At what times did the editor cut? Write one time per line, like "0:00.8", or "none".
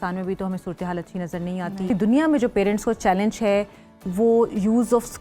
0:01.9

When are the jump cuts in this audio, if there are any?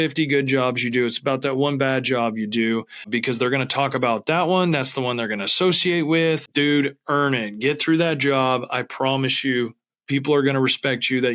0:03.0
0:06.5

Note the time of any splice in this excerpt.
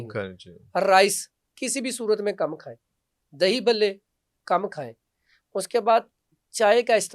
none

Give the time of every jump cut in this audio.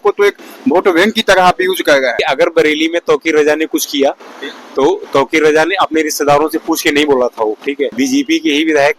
0:02.2
0:07.9

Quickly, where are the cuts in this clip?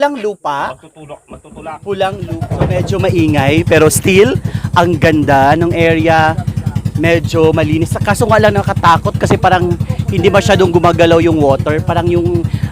0:02.4

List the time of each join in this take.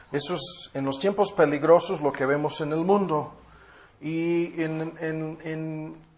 0:04.6

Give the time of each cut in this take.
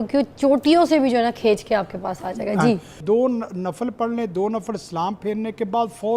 0:03.0

